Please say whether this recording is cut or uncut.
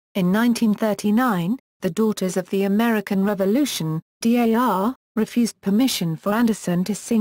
uncut